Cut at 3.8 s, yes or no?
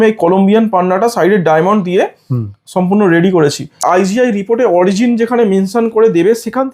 yes